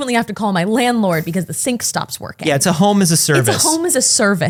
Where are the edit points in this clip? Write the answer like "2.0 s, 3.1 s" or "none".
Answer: none